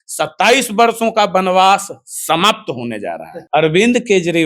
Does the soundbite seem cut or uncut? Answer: cut